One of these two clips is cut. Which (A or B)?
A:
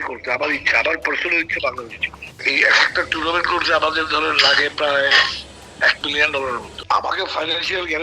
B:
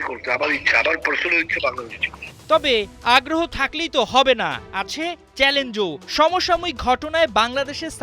A